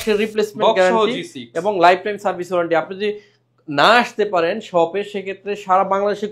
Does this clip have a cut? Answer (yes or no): no